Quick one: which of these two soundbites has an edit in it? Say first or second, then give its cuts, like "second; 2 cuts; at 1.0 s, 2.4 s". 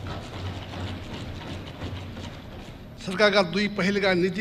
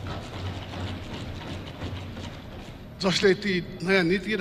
first; 1 cut; at 2.9 s